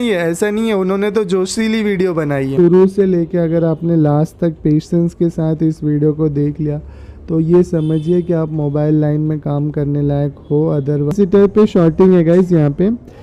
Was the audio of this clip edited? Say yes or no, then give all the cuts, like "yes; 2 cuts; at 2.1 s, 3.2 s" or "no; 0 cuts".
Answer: yes; 2 cuts; at 2.6 s, 11.1 s